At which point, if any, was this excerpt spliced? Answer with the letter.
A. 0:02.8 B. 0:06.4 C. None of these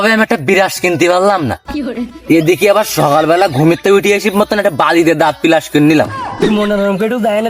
B